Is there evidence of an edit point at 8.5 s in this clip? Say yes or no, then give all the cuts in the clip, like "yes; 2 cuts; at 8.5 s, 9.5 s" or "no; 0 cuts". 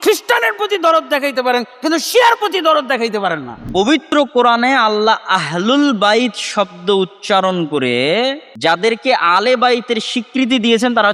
yes; 2 cuts; at 3.9 s, 8.5 s